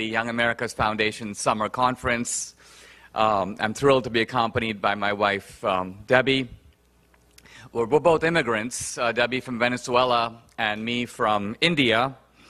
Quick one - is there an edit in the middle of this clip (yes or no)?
no